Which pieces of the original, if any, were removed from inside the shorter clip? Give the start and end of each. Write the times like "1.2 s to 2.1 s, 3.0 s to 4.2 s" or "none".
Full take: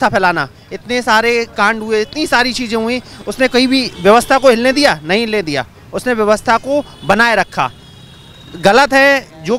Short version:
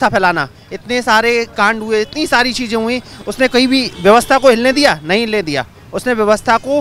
none